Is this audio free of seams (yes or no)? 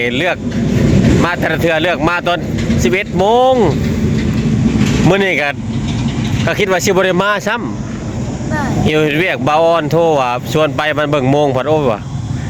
yes